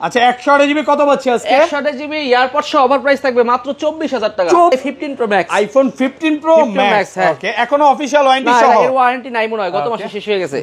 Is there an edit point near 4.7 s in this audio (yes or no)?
yes